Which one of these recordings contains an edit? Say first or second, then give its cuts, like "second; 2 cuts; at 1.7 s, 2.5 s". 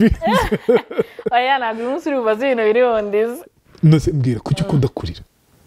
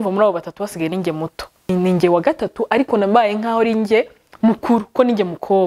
second; 1 cut; at 1.7 s